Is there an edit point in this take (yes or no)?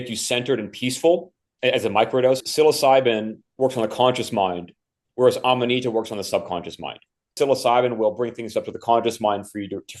yes